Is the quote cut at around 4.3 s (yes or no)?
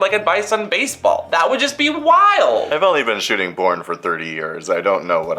no